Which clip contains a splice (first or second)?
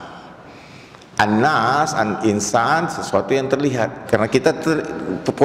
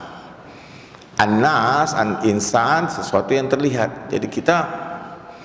first